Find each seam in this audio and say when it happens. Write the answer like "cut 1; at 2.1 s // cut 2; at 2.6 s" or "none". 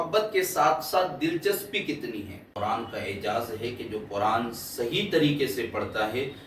cut 1; at 2.4 s